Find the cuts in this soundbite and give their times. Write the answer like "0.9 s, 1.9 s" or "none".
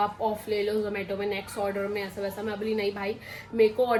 none